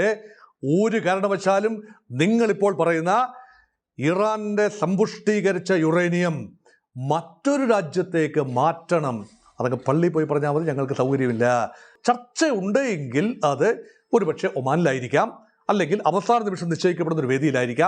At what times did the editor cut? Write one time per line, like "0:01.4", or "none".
0:11.9